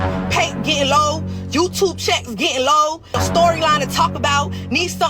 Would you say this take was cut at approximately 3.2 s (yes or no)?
yes